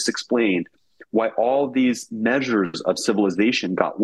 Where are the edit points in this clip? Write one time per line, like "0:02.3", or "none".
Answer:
none